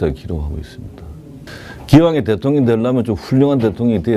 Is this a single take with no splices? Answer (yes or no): no